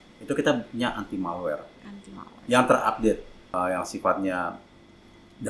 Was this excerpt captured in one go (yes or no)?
no